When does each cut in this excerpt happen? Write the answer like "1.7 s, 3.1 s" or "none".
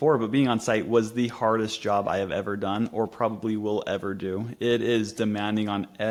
none

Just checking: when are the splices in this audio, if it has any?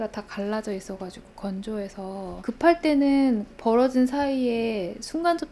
2.4 s

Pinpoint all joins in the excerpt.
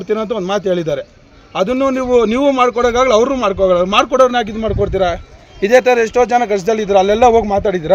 none

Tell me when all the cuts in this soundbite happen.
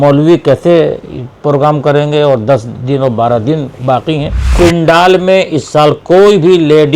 4.5 s

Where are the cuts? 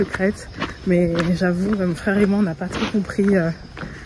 none

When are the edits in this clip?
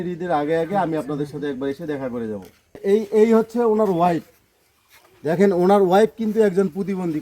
2.8 s

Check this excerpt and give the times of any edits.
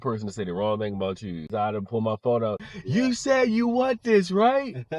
1.5 s, 2.7 s

